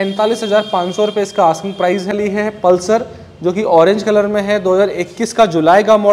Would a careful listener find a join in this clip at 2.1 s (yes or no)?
yes